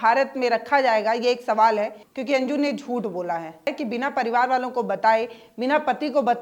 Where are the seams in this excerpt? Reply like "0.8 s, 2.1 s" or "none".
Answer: 2.1 s, 3.7 s